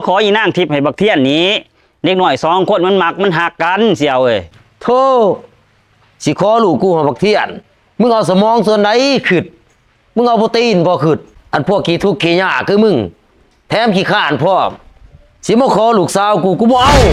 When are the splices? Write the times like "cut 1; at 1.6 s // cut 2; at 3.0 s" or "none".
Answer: none